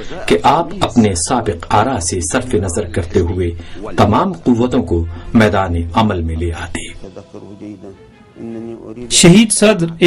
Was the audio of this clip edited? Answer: no; 0 cuts

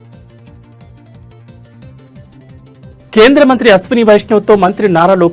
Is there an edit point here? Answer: yes; 1 cut; at 3.1 s

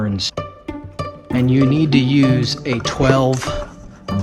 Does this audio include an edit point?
no; 0 cuts

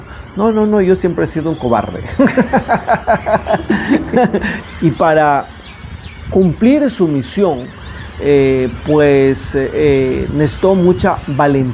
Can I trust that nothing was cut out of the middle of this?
no; 1 cut; at 4.5 s

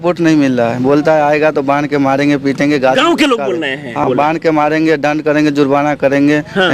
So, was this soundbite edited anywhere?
yes; 1 cut; at 4.0 s

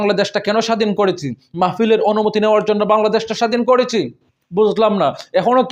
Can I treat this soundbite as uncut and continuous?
yes; 0 cuts

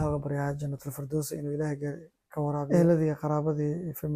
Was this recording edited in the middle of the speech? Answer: yes; 1 cut; at 2.7 s

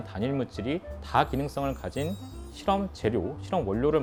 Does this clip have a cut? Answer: no; 0 cuts

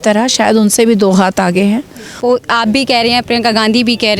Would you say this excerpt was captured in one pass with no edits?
no; 1 cut; at 2.1 s

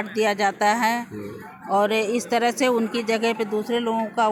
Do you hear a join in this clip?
no; 0 cuts

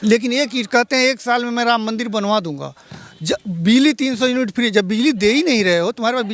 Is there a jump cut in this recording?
no; 0 cuts

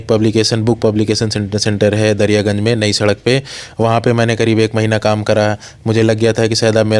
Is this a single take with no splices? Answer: yes; 0 cuts

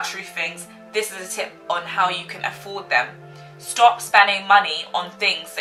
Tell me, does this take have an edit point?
no; 0 cuts

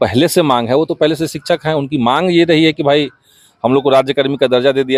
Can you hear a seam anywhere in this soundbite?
no; 0 cuts

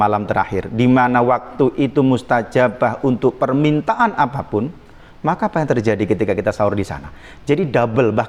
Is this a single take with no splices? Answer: yes; 0 cuts

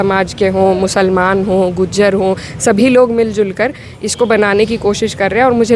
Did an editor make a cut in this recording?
no; 0 cuts

